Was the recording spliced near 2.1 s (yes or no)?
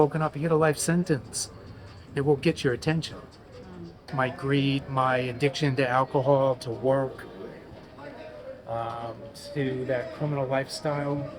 no